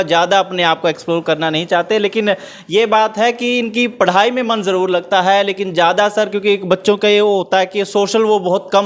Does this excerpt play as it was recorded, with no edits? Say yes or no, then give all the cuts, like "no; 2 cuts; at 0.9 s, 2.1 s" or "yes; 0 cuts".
yes; 0 cuts